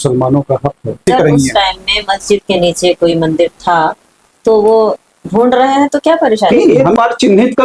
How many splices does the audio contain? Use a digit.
2